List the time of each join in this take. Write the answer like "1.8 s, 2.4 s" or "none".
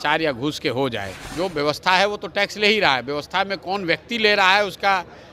1.2 s